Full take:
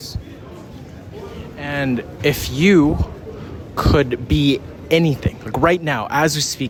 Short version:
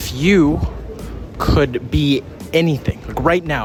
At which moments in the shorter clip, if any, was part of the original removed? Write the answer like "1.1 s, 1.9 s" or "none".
none